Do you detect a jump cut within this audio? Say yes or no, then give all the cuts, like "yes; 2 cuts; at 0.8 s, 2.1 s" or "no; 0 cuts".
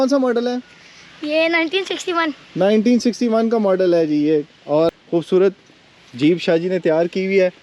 no; 0 cuts